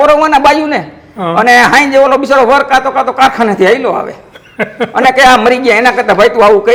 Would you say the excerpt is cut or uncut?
uncut